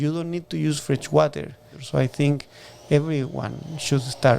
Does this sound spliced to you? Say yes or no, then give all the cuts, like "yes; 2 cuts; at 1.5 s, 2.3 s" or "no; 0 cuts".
yes; 1 cut; at 1.8 s